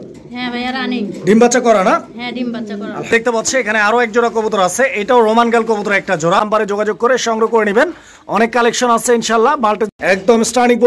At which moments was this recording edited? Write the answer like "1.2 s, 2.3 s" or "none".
3.1 s, 6.9 s, 9.6 s